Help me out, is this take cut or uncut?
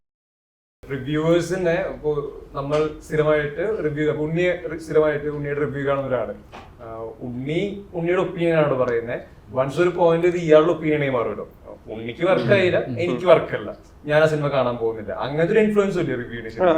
uncut